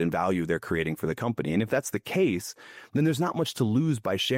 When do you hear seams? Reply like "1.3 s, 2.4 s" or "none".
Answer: none